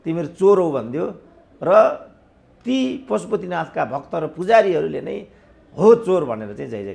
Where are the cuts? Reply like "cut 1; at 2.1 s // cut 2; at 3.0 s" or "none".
none